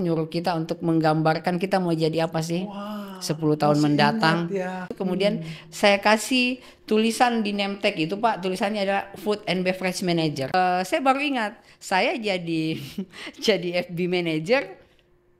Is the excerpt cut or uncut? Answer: cut